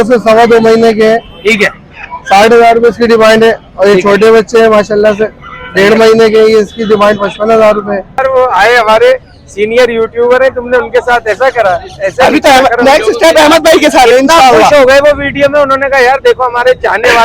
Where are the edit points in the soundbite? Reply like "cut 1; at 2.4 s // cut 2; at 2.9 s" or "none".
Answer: cut 1; at 8.2 s